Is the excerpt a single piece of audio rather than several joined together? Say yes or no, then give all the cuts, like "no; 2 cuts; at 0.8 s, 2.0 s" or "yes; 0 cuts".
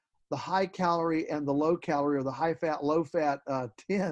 yes; 0 cuts